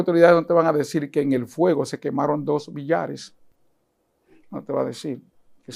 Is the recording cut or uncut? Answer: uncut